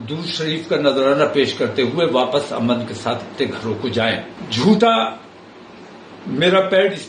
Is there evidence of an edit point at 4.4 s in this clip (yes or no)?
yes